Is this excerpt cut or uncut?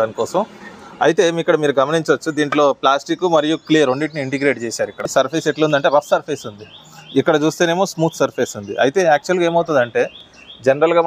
uncut